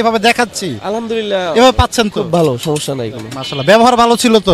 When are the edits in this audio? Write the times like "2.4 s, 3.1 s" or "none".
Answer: none